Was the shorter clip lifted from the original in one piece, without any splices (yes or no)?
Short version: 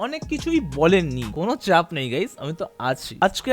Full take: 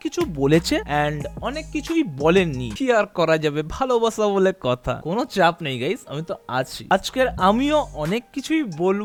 no